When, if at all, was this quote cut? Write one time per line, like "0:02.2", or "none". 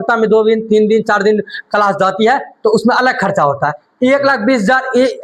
none